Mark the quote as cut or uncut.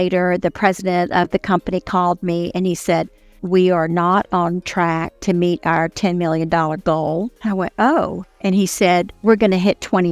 cut